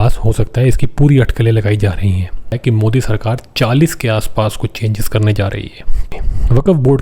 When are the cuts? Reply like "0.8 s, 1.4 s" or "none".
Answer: 2.6 s, 6.1 s